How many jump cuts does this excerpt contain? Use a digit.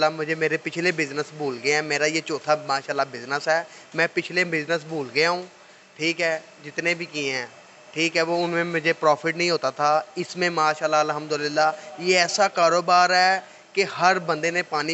0